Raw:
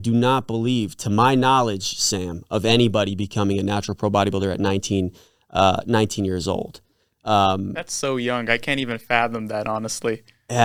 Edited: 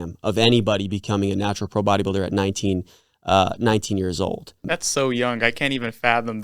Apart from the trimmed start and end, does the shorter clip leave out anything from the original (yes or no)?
yes